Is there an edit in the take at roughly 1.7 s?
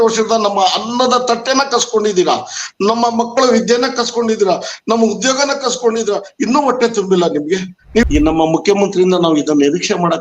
no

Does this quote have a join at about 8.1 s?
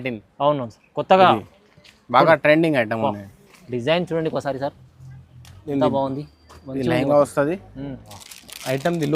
yes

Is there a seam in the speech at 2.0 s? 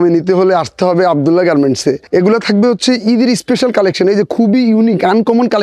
yes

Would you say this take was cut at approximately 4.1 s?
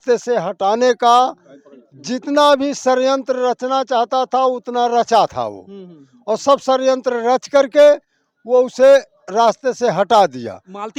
no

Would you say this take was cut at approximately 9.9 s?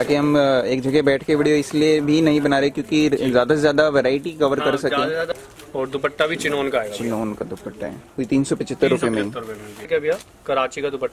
yes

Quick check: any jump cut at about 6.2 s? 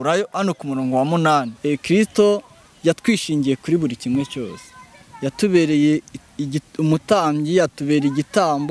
no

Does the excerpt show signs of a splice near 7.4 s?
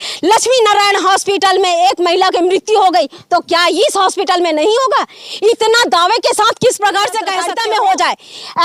yes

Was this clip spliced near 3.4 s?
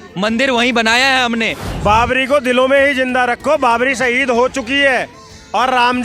no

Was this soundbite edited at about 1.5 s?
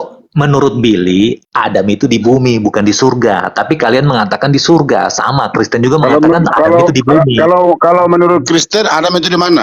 yes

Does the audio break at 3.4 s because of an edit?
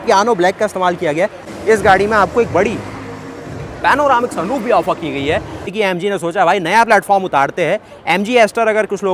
no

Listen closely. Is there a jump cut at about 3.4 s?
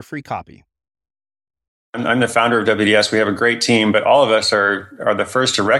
no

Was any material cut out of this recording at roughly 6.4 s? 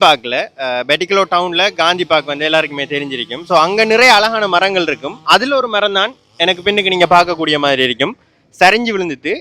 no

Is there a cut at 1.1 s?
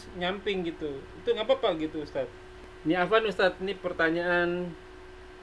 no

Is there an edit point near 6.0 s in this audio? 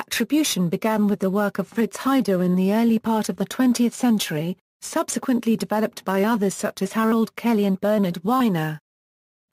no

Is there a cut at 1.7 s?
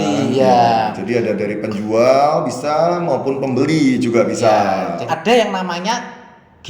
no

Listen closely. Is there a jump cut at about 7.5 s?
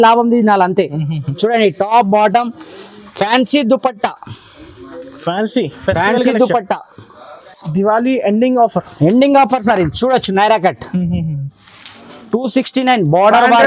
yes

